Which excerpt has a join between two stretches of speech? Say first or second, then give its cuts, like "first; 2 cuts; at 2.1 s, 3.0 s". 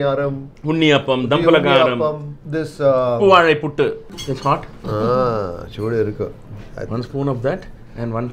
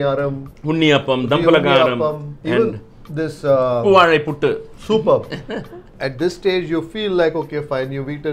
first; 2 cuts; at 2.3 s, 4.1 s